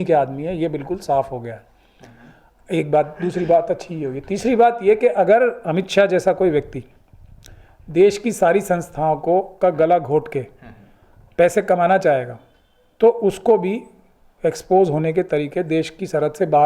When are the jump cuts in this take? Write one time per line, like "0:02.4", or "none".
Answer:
none

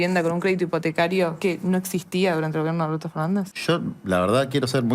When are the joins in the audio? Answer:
0:01.4
0:03.5

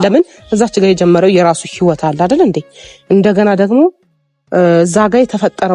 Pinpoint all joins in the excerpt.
none

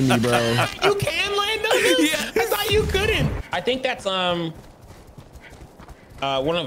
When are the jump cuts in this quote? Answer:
0:03.3

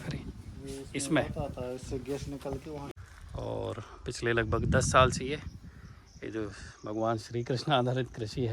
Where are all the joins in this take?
0:02.8

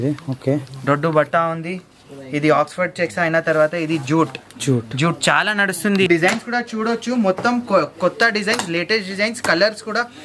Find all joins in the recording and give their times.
0:06.1

